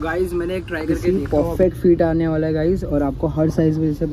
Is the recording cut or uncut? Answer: cut